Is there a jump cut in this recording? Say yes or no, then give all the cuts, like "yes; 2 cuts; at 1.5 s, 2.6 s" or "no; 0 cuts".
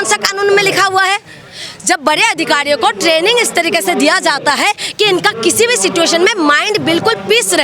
no; 0 cuts